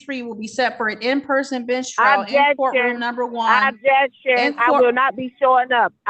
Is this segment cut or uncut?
uncut